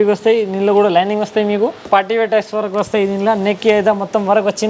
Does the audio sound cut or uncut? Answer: cut